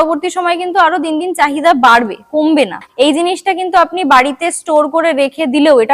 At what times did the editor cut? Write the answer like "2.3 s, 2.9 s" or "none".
2.9 s